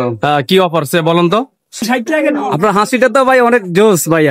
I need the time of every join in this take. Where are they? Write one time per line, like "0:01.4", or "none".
0:01.8

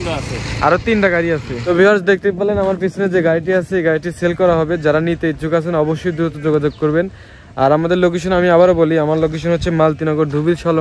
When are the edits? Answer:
0:01.6

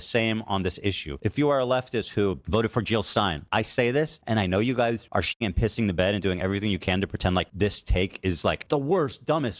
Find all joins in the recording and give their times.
0:01.1
0:02.4
0:03.4
0:04.2
0:05.3
0:07.5
0:08.6

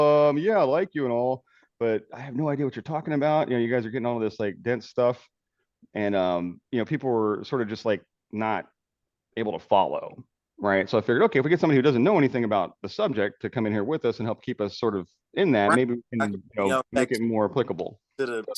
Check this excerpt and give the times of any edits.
none

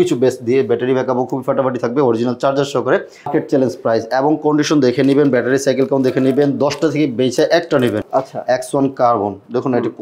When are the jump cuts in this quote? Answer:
0:03.3
0:08.0

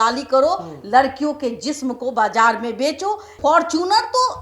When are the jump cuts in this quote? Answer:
0:03.3

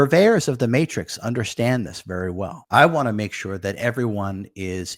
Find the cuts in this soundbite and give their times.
0:02.6

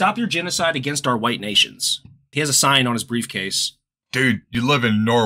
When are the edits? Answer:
0:02.2
0:04.5

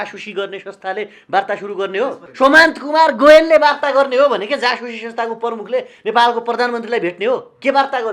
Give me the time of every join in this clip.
0:02.2

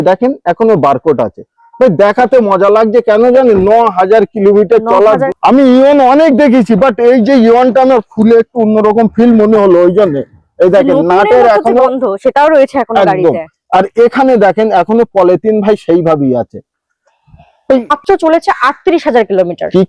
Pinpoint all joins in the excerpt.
0:05.3
0:18.0

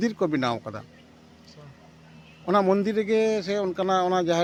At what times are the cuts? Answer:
none

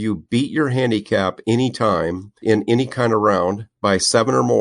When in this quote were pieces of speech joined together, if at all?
0:02.4
0:03.7

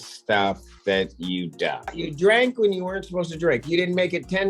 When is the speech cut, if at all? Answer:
0:02.0

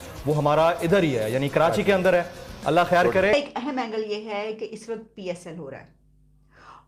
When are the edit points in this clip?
0:03.3

